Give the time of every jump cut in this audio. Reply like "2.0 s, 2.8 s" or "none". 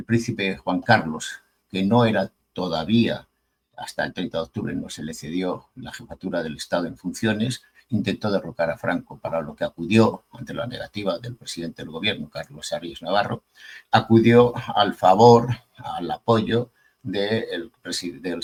none